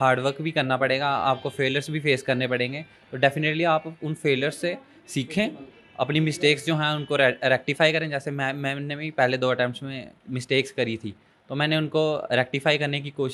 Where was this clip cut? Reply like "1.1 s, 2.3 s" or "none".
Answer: none